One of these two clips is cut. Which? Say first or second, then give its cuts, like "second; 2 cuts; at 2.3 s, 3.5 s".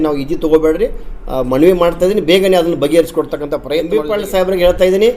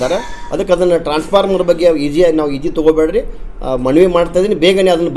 first; 1 cut; at 3.8 s